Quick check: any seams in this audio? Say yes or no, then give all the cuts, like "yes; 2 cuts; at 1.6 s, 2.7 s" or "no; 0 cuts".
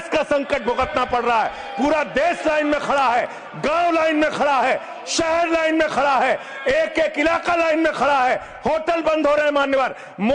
no; 0 cuts